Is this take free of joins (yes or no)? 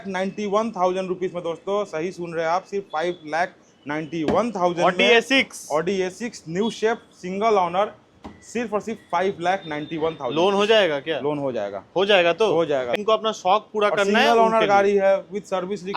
no